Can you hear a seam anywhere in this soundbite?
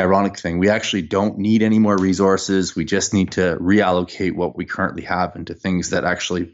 no; 0 cuts

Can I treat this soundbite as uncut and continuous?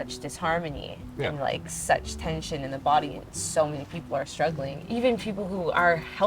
yes; 0 cuts

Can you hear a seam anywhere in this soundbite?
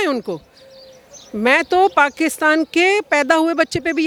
no; 0 cuts

